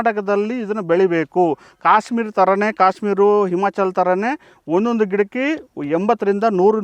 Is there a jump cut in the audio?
no; 0 cuts

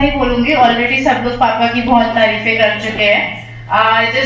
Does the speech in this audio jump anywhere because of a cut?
no; 0 cuts

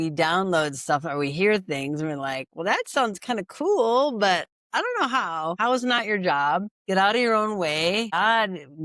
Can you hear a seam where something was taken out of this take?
yes; 3 cuts; at 5.5 s, 6.8 s, 8.1 s

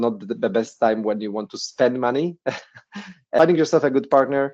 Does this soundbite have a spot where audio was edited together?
yes; 1 cut; at 3.4 s

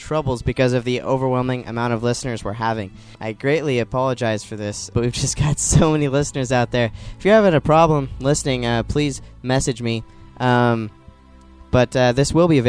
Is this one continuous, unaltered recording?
no; 2 cuts; at 3.1 s, 4.9 s

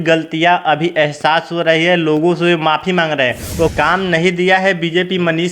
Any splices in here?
yes; 1 cut; at 3.7 s

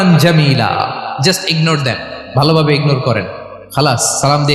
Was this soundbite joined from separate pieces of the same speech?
no; 0 cuts

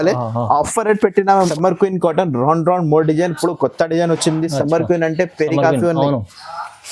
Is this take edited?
yes; 1 cut; at 1.5 s

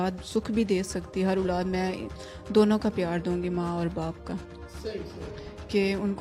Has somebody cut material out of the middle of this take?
no; 0 cuts

